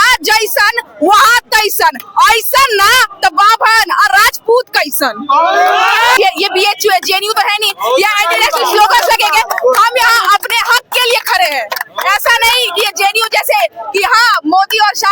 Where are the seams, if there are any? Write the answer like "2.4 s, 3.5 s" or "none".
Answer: 6.2 s